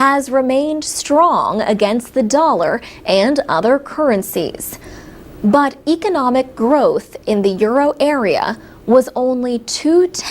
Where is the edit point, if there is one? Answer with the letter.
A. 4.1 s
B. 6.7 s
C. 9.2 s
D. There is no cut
B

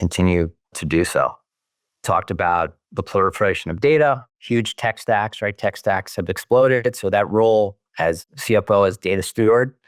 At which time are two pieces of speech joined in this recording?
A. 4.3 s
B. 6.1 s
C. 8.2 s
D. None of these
C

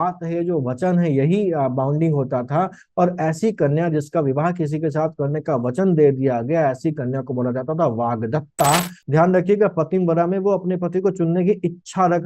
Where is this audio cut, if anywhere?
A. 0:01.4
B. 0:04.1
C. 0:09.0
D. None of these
C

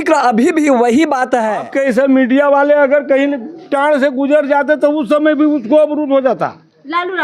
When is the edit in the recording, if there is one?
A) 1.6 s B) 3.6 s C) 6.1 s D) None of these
A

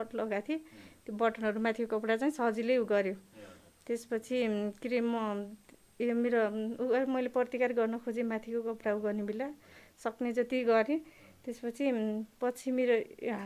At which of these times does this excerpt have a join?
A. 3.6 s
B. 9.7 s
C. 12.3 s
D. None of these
D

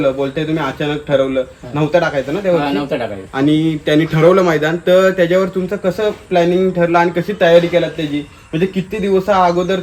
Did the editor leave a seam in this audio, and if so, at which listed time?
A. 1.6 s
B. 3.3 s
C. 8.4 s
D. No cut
D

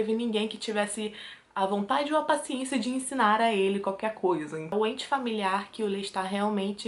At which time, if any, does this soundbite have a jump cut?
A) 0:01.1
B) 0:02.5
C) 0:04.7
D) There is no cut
C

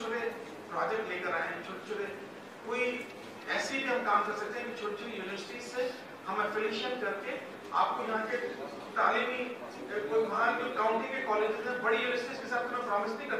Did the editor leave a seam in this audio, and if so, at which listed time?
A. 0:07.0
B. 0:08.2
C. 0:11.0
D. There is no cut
D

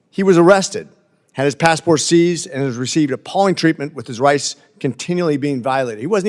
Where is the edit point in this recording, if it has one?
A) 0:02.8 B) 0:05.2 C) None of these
C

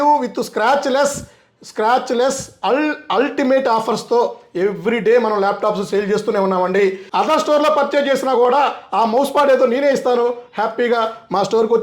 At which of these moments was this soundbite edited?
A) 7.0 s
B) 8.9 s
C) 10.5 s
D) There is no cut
A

